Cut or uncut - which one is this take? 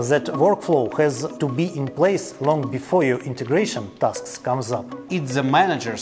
cut